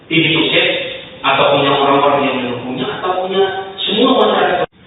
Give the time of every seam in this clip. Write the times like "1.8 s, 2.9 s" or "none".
none